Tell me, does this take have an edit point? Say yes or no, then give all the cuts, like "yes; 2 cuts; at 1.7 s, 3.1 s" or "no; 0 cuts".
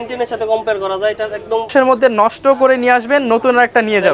yes; 1 cut; at 1.7 s